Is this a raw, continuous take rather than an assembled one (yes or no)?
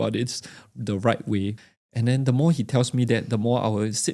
no